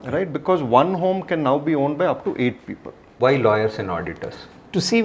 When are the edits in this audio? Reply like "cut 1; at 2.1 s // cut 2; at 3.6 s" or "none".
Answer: cut 1; at 3.1 s